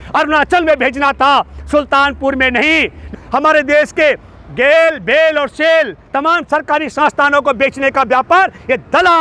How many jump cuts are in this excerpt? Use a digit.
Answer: 1